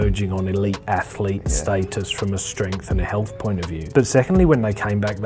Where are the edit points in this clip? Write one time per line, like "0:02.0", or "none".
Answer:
0:03.8